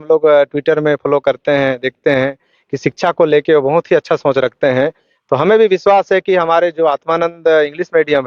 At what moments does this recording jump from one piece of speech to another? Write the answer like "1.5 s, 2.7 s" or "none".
none